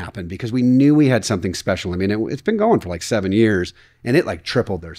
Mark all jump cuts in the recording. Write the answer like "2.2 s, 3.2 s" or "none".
none

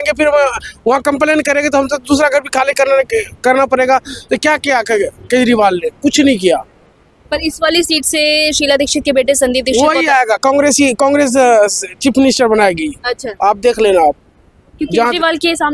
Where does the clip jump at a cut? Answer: none

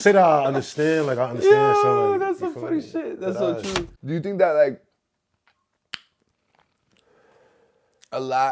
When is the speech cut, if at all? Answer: 3.9 s

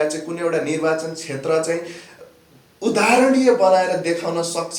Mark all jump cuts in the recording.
none

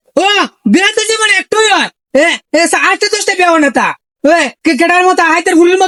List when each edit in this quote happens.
none

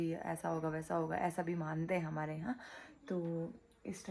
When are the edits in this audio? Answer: none

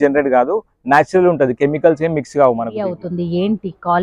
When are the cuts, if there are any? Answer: 3.0 s

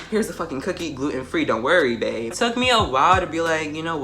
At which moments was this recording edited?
2.3 s

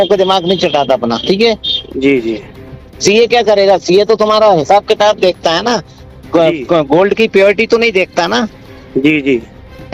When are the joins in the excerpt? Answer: none

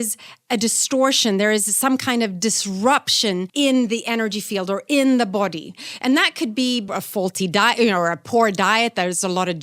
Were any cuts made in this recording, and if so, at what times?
3.5 s, 6.8 s

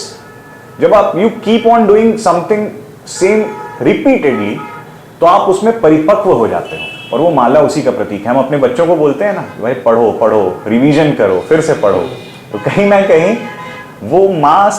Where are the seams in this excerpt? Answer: none

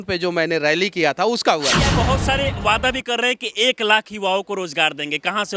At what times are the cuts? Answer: 2.1 s

